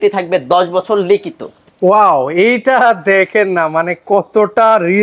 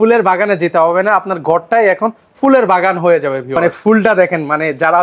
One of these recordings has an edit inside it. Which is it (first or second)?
second